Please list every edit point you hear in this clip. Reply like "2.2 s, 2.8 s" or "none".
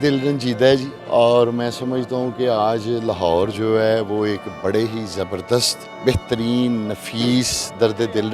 0.9 s

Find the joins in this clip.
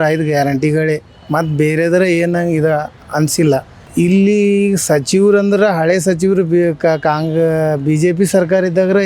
3.8 s

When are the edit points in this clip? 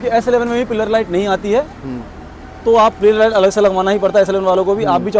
none

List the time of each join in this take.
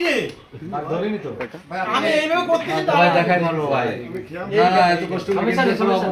none

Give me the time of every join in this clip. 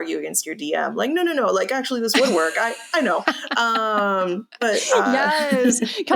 none

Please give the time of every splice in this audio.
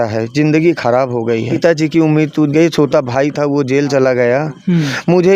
1.5 s

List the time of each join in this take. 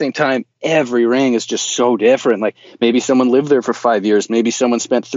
none

